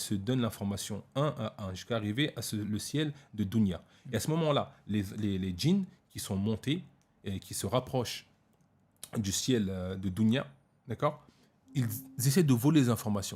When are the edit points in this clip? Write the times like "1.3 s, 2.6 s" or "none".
none